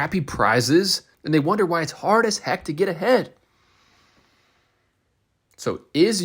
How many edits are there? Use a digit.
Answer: 1